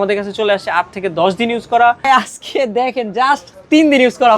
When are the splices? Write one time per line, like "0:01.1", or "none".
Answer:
0:02.1